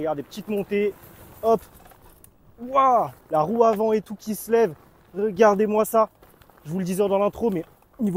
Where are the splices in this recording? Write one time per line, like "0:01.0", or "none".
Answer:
0:03.2